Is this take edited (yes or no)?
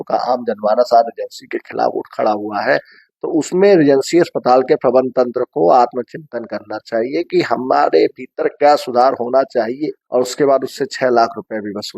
yes